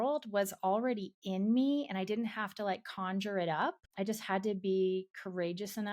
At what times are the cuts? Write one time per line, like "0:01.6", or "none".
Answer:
0:03.8